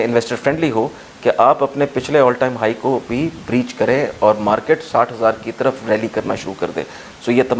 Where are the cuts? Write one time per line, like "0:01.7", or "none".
none